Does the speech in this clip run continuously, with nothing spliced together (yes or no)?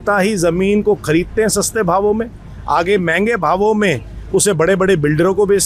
yes